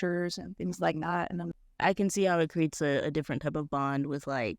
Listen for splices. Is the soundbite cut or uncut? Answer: cut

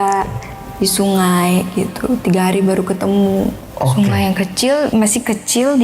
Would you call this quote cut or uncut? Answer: cut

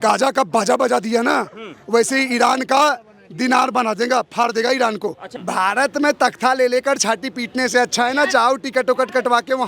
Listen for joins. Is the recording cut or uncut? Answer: cut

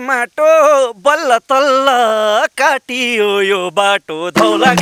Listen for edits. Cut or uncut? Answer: uncut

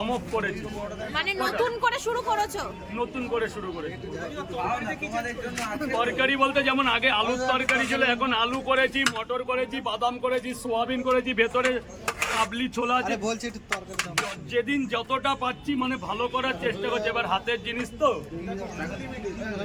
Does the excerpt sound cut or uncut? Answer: uncut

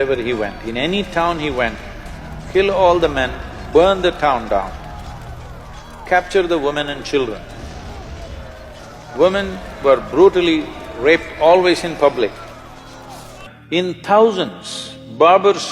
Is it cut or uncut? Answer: cut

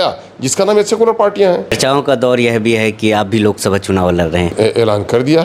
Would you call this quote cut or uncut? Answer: cut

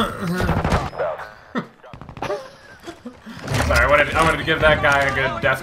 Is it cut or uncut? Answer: uncut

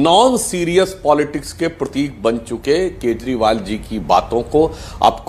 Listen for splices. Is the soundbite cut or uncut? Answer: uncut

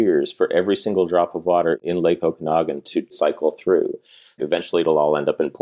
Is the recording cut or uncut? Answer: cut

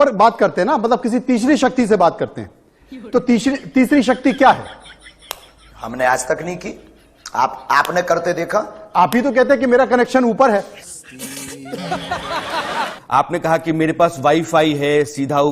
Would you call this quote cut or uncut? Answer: cut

